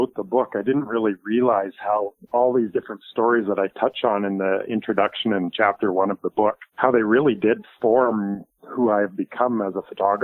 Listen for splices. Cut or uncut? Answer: cut